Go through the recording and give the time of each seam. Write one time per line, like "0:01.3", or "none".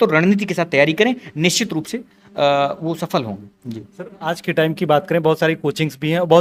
none